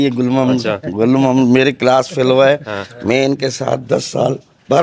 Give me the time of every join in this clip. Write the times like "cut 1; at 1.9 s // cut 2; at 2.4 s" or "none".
none